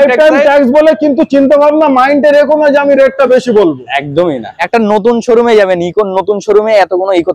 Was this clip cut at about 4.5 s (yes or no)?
yes